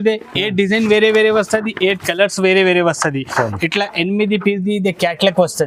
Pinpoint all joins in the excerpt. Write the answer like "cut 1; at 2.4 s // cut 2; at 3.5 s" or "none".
none